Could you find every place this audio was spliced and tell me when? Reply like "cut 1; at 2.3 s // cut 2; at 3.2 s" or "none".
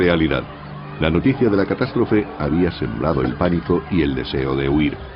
cut 1; at 2.3 s

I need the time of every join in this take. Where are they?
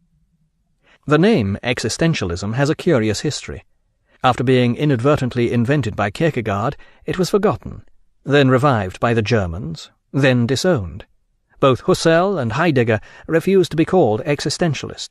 cut 1; at 11.3 s

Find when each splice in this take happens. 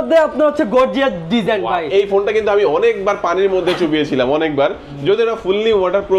none

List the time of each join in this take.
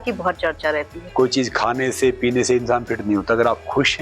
cut 1; at 1.0 s

